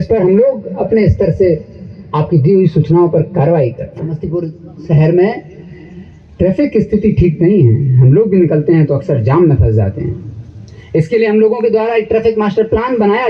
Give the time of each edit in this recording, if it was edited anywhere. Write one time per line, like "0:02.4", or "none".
0:04.2